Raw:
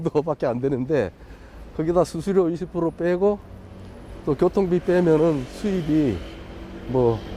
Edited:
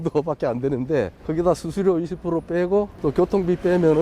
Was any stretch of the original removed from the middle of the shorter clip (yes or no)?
yes